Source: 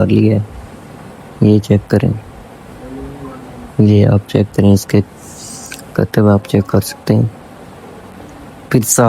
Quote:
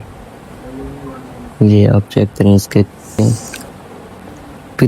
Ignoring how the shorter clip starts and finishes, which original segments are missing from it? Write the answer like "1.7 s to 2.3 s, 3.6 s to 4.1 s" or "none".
5.4 s to 7.1 s